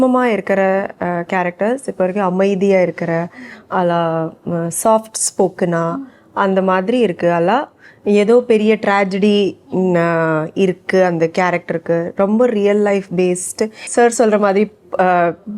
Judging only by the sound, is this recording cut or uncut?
cut